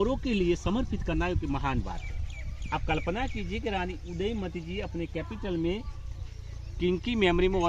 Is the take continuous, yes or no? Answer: yes